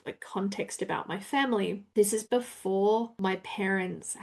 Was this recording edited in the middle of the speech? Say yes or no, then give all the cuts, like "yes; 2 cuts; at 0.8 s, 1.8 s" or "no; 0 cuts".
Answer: yes; 2 cuts; at 1.8 s, 3.1 s